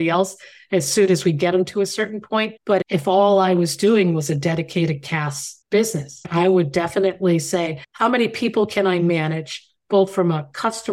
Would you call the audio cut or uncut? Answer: cut